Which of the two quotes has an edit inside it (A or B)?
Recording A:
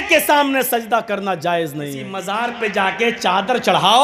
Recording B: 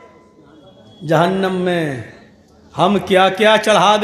A